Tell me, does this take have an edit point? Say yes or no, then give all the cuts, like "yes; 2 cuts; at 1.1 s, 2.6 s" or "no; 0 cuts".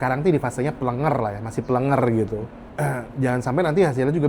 yes; 1 cut; at 2.6 s